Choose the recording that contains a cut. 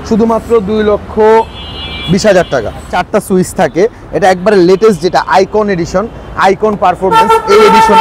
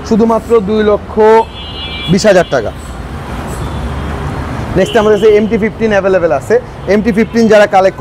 first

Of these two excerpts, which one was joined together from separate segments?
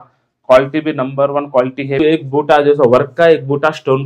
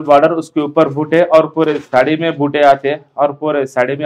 first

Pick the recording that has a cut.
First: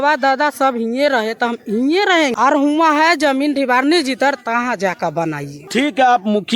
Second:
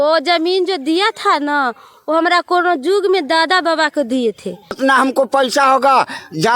second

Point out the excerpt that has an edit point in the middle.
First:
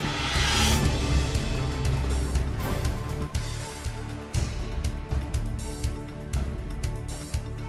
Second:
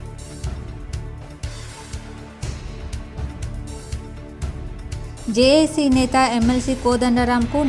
second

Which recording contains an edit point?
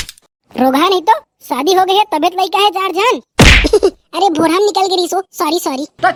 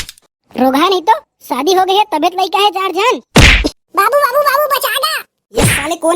second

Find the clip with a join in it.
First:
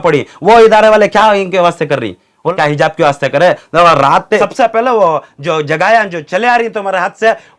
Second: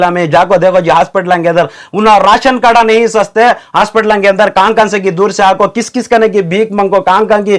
first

